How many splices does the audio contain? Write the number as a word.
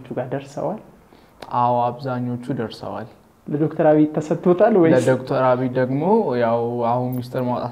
zero